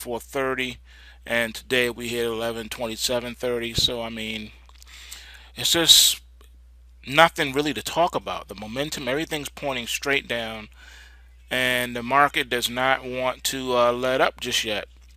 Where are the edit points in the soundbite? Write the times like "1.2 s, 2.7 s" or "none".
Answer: 12.7 s